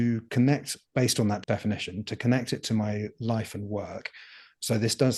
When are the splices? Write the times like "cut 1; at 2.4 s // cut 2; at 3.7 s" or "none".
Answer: cut 1; at 1.4 s